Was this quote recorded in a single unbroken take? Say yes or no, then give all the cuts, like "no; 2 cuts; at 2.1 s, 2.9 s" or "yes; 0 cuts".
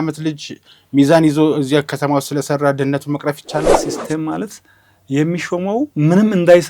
no; 1 cut; at 3.8 s